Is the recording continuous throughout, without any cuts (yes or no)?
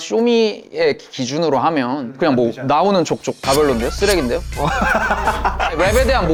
yes